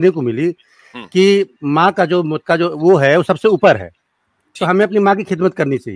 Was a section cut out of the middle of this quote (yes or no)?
yes